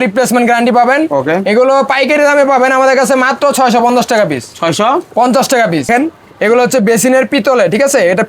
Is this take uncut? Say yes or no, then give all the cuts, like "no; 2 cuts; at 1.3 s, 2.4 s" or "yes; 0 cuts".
no; 1 cut; at 5.9 s